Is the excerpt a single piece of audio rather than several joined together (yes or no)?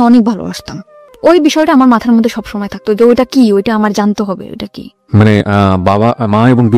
no